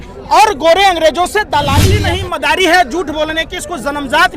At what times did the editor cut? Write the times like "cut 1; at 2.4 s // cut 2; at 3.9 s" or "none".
cut 1; at 2.1 s